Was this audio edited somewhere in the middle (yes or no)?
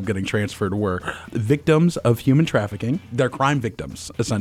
yes